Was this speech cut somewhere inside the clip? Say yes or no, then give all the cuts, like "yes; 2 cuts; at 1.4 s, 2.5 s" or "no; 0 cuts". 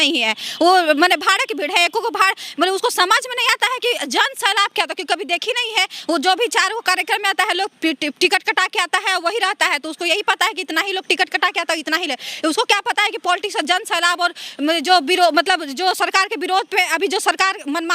no; 0 cuts